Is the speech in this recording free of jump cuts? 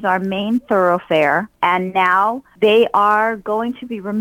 no; 2 cuts; at 1.5 s, 2.5 s

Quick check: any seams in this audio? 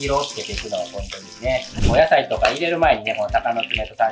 yes; 1 cut; at 1.8 s

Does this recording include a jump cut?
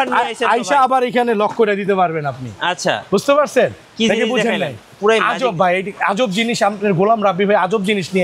no; 0 cuts

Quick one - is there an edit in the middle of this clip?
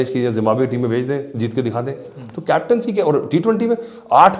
no; 0 cuts

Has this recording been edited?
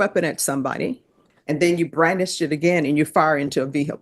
yes; 1 cut; at 1.3 s

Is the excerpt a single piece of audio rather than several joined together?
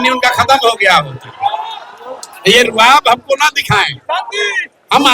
yes; 0 cuts

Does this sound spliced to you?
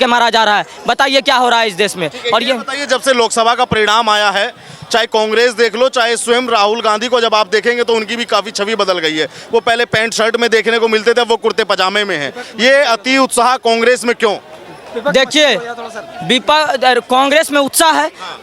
no; 0 cuts

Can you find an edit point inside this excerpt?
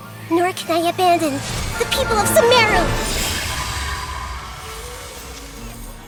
no; 0 cuts

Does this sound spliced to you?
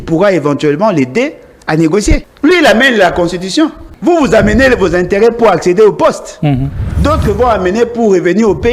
yes; 2 cuts; at 2.3 s, 3.9 s

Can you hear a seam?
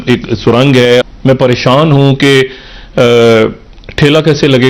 yes; 1 cut; at 1.0 s

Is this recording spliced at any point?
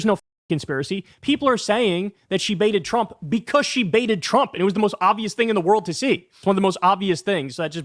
yes; 1 cut; at 6.4 s

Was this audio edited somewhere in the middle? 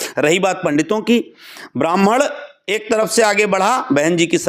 no; 0 cuts

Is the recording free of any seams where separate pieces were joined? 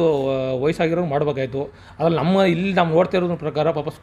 yes; 0 cuts

